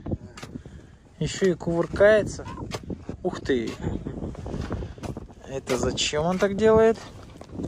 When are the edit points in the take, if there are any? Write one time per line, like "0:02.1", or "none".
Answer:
0:02.4
0:05.3

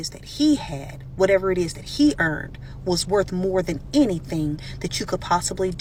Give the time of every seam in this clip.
none

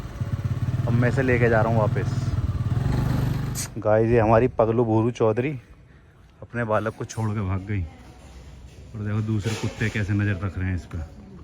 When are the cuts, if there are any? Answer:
0:03.6

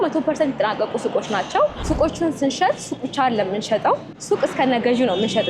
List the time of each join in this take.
0:01.8
0:04.1

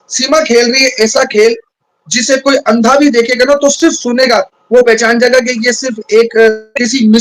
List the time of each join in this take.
none

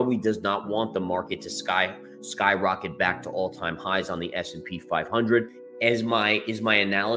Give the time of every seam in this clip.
0:05.6

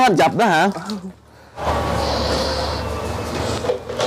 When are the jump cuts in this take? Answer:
0:01.6

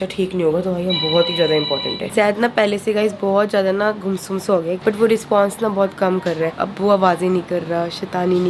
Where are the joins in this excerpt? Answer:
0:02.0
0:04.8
0:06.5

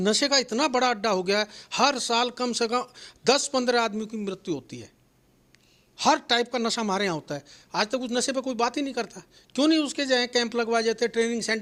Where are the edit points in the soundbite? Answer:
none

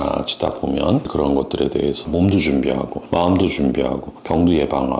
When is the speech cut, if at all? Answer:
0:01.1

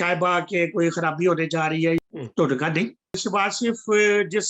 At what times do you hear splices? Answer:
0:02.0
0:03.2

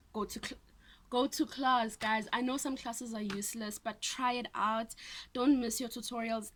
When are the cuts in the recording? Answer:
none

